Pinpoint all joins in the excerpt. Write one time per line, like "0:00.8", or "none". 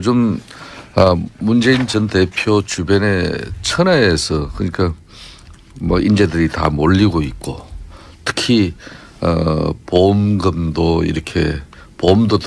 none